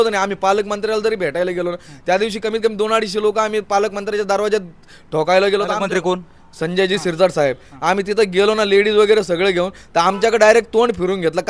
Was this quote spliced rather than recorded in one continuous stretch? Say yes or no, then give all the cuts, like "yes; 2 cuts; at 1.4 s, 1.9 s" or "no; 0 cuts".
no; 0 cuts